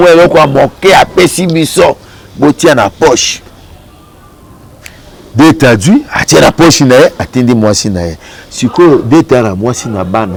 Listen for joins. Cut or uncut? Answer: uncut